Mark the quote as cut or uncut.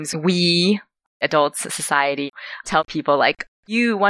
cut